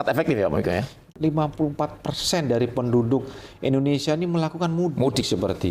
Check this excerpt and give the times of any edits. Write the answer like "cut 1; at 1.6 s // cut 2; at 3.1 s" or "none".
cut 1; at 1.1 s